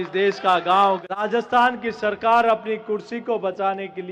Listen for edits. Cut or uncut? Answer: cut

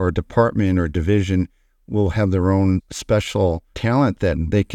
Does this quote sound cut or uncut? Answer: cut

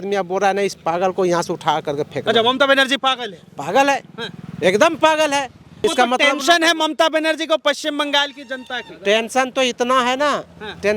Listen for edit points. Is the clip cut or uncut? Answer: cut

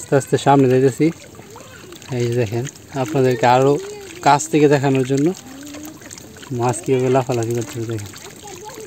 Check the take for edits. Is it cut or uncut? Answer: uncut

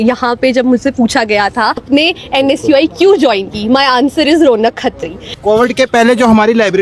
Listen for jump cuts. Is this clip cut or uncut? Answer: cut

